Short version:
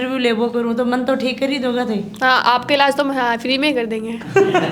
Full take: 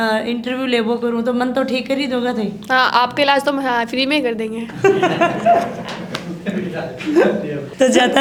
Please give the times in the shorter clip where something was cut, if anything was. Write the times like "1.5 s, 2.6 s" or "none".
none